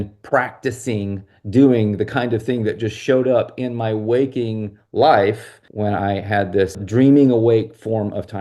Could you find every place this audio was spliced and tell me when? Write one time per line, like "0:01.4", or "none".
0:05.6
0:06.8